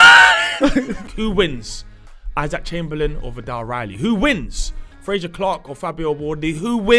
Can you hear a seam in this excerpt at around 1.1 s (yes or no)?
yes